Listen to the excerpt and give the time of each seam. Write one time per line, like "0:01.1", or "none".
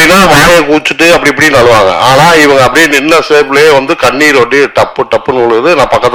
none